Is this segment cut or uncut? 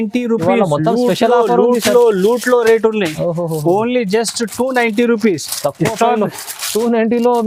uncut